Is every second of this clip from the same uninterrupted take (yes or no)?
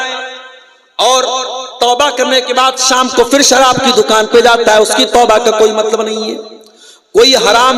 yes